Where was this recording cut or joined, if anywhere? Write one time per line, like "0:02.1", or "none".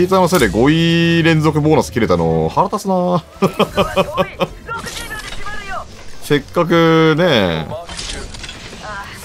none